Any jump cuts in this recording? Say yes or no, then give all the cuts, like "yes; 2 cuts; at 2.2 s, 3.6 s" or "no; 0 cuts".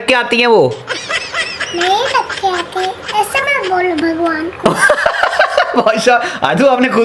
no; 0 cuts